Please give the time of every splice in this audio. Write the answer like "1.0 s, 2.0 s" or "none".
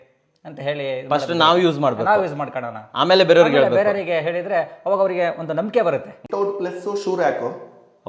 6.2 s